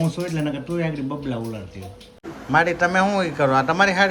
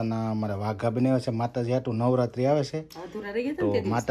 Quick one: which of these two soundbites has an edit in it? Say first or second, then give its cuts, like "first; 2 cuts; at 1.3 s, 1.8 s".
first; 1 cut; at 2.2 s